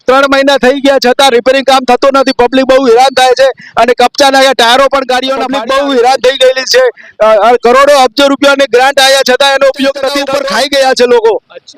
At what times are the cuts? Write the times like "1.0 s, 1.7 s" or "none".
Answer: 5.5 s, 10.3 s